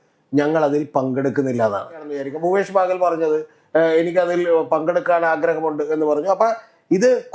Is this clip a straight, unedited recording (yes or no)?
no